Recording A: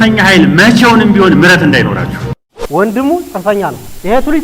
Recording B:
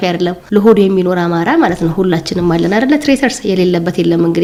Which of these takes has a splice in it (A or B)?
A